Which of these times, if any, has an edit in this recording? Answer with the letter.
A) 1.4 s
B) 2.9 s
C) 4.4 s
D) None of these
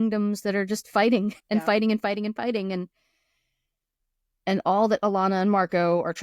A